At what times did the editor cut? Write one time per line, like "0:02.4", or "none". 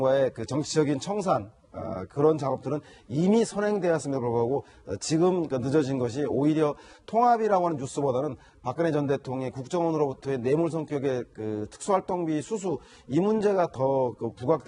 0:01.0